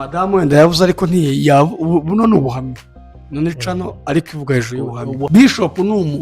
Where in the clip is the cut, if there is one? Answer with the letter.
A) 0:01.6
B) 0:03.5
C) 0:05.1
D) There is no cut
C